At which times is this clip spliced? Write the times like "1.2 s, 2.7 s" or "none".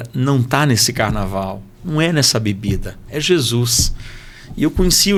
none